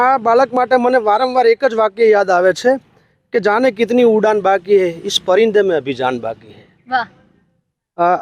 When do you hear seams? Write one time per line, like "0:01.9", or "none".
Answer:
none